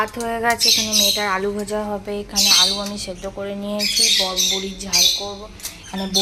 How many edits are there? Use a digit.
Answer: 0